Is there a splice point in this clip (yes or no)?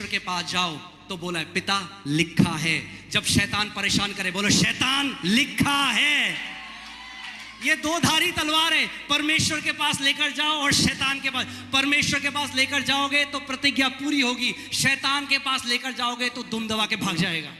no